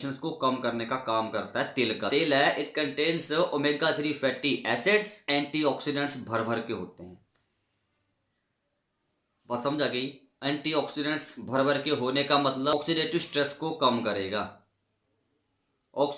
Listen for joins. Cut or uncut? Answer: cut